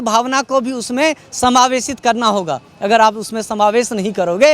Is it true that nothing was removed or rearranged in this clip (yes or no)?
yes